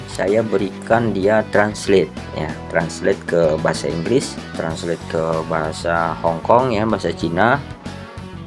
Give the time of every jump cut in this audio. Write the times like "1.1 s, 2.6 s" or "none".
4.4 s